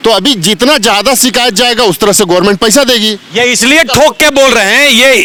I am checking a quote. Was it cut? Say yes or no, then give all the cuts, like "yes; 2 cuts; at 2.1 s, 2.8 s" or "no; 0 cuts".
no; 0 cuts